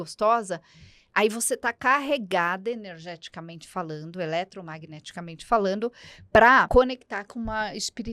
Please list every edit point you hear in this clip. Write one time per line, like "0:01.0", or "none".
0:06.7